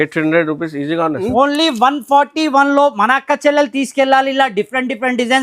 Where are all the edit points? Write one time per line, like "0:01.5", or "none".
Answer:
0:01.3